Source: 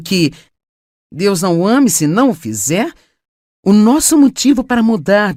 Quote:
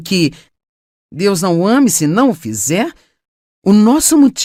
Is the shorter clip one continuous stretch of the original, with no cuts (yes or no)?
yes